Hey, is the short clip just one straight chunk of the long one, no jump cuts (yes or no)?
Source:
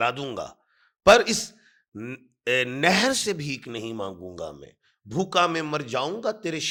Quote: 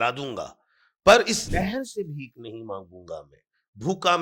no